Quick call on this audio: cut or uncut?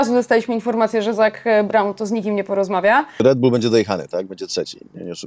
cut